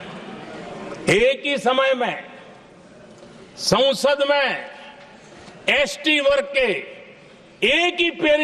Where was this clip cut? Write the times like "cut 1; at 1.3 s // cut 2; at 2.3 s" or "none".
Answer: none